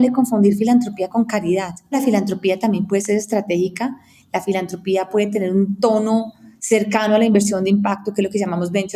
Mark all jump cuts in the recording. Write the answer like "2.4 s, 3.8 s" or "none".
1.9 s

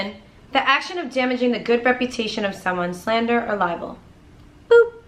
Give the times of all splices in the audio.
none

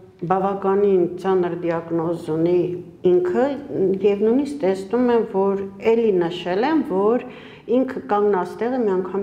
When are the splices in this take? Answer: none

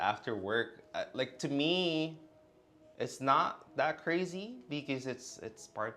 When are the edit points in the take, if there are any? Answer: none

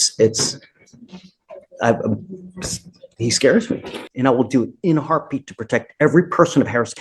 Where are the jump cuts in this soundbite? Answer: 4.0 s

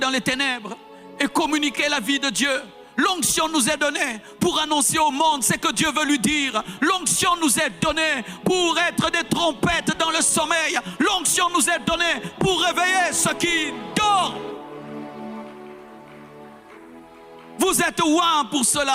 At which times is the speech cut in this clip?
none

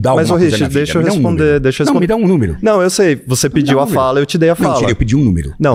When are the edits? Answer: none

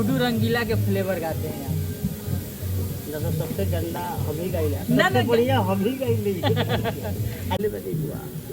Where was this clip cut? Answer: 7.6 s

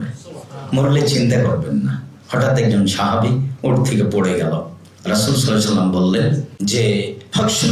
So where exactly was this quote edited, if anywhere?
6.5 s

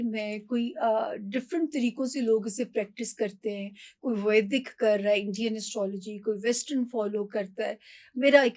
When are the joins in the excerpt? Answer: none

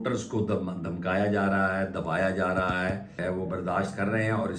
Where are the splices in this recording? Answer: 3.1 s

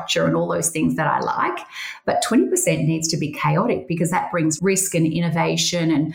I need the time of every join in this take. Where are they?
none

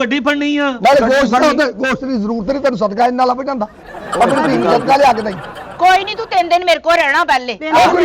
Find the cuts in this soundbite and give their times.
5.6 s

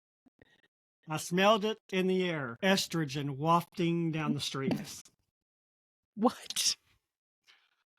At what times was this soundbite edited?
2.5 s

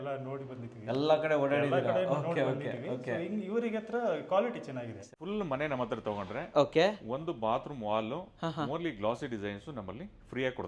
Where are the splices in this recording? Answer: 5.1 s

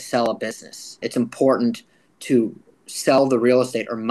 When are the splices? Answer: 1.0 s

